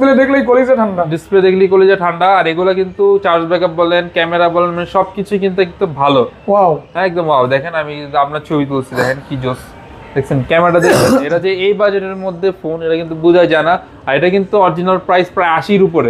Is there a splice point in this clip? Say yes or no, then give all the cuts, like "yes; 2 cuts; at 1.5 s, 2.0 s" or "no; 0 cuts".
no; 0 cuts